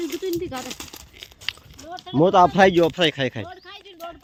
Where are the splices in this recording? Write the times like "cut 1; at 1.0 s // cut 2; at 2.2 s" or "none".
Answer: none